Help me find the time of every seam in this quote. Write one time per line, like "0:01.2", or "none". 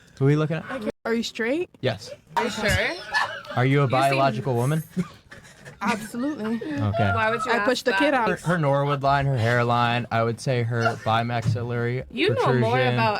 0:00.9
0:02.3
0:08.3